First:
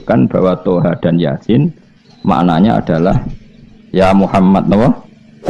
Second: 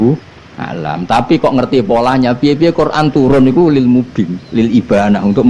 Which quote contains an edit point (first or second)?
second